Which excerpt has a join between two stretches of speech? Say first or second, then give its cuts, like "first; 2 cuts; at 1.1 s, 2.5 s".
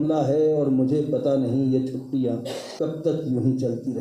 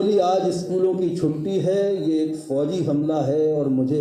first; 1 cut; at 2.6 s